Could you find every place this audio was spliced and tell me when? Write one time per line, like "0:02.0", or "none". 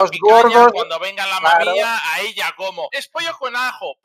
0:03.0